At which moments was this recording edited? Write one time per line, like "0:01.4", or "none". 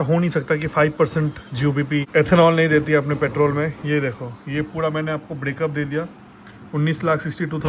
0:02.1